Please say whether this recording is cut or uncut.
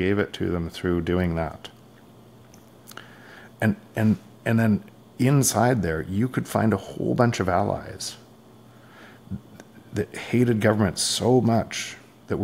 uncut